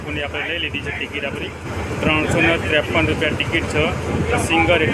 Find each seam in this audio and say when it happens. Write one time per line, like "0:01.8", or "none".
none